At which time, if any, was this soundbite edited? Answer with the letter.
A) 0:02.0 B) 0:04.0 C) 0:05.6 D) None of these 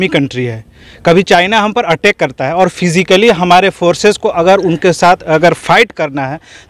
D